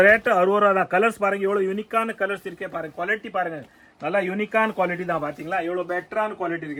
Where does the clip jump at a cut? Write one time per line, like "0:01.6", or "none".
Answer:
none